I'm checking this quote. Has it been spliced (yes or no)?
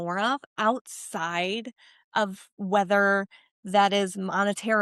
no